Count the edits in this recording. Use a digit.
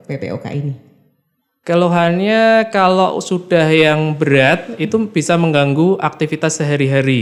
0